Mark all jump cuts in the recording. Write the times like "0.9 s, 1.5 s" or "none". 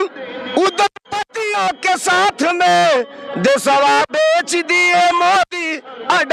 none

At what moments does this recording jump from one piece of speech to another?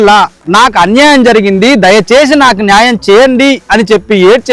none

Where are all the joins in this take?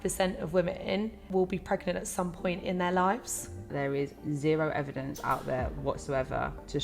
1.2 s, 3.7 s

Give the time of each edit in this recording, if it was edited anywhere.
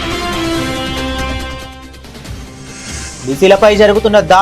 3.2 s

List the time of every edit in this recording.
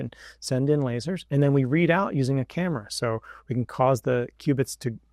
none

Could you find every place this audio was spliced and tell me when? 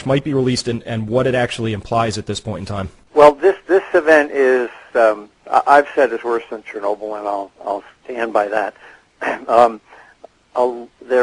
none

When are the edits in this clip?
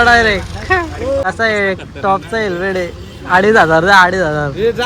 1.2 s

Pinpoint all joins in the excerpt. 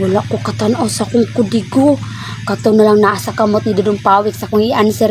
none

